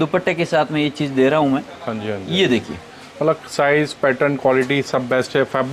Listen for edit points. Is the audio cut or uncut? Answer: uncut